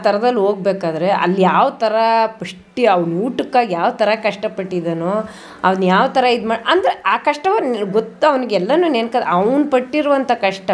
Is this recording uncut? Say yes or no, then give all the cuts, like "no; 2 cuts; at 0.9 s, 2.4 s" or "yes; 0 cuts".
yes; 0 cuts